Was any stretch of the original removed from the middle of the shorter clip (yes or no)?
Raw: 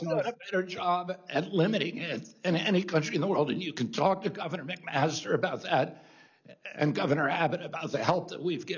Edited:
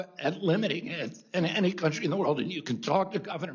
no